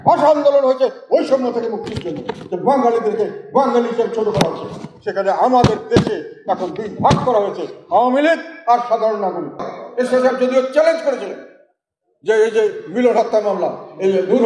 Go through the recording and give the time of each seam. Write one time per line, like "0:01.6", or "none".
0:09.7